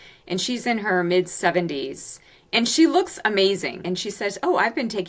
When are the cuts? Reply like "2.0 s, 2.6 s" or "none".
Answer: 3.8 s